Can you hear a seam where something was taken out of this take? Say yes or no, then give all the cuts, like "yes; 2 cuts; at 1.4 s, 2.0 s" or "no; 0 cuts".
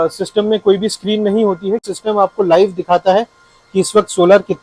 yes; 1 cut; at 1.9 s